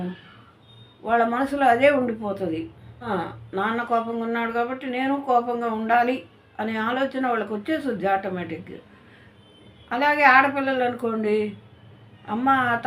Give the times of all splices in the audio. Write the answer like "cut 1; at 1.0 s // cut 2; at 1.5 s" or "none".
cut 1; at 3.1 s